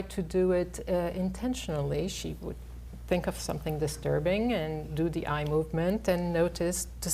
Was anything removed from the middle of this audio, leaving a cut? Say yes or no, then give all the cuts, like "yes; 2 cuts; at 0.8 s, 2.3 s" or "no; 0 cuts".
no; 0 cuts